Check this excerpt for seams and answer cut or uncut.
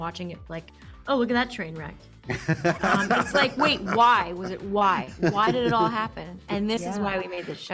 uncut